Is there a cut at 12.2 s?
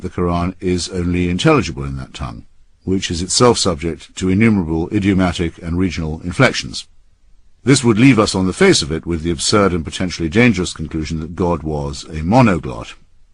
yes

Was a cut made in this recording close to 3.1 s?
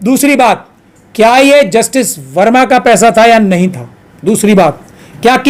no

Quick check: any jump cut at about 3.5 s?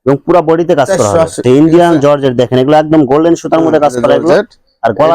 no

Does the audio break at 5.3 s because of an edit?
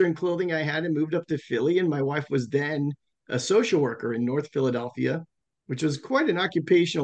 no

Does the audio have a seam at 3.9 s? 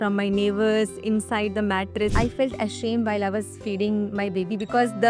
no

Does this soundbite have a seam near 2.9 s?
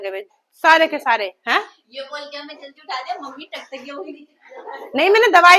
no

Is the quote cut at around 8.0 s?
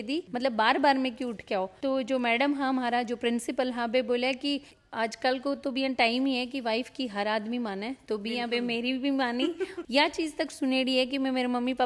no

